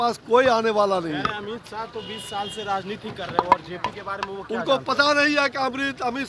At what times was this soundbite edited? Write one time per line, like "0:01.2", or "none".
none